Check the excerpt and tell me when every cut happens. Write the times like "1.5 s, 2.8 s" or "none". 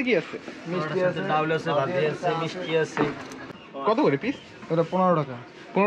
3.6 s